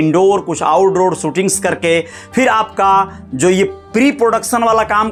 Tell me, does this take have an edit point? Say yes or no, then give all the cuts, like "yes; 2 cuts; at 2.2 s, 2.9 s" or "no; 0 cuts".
no; 0 cuts